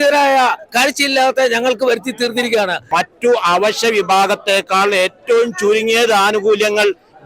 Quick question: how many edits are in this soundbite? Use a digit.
1